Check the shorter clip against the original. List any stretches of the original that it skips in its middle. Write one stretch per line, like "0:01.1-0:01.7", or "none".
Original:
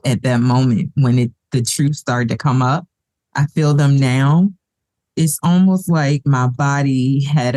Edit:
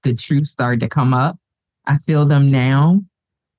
none